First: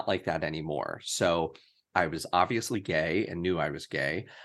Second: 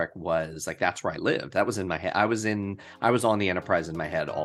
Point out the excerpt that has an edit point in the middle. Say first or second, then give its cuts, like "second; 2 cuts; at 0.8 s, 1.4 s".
first; 1 cut; at 1.9 s